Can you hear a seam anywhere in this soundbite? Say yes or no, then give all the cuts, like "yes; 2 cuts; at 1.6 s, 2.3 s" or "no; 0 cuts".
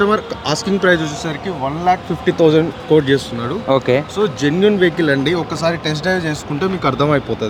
no; 0 cuts